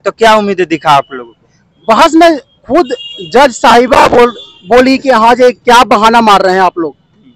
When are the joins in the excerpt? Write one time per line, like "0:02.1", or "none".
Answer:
none